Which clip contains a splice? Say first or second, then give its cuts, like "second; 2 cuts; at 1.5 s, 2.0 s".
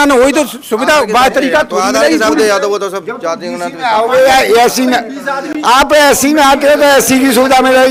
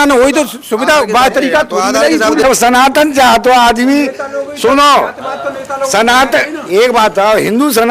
second; 1 cut; at 2.4 s